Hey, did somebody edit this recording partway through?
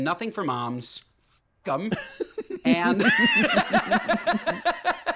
no; 0 cuts

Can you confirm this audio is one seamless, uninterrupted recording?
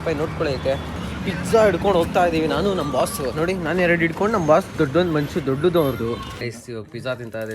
no; 2 cuts; at 1.0 s, 6.5 s

